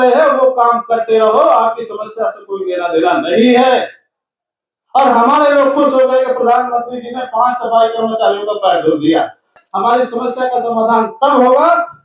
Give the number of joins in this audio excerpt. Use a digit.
1